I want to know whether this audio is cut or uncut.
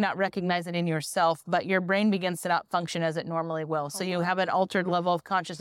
uncut